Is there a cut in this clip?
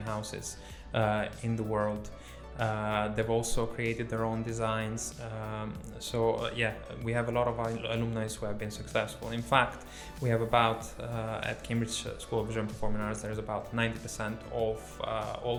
no; 0 cuts

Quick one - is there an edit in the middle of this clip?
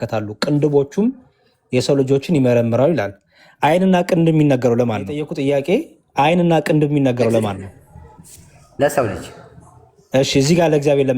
yes; 1 cut; at 5.3 s

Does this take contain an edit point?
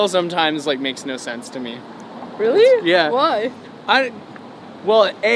no; 0 cuts

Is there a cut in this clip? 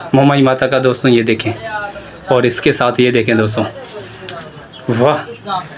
no; 0 cuts

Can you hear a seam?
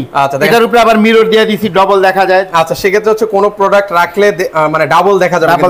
no; 0 cuts

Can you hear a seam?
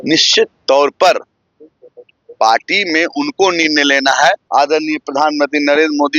yes; 1 cut; at 4.4 s

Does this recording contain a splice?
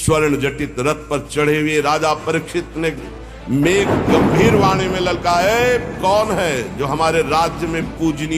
no; 0 cuts

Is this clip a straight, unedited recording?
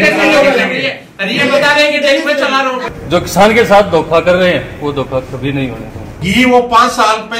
no; 2 cuts; at 2.8 s, 6.2 s

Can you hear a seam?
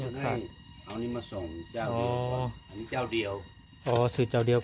no; 0 cuts

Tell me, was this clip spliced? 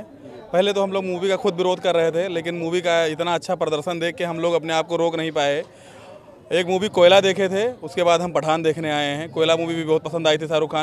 no; 0 cuts

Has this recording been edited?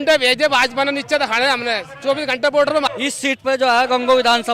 yes; 1 cut; at 2.9 s

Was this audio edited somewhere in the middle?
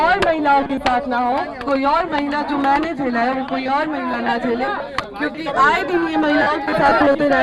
no; 0 cuts

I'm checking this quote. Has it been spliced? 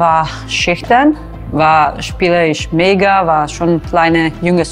no; 0 cuts

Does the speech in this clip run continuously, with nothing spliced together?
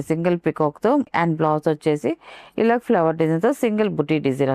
no; 1 cut; at 1.1 s

